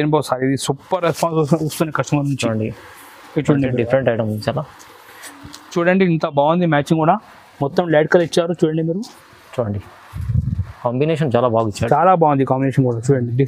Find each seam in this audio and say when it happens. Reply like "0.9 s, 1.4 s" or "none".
5.7 s